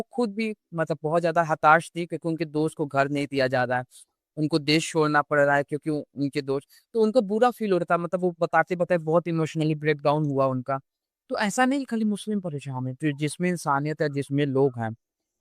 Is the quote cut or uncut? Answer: uncut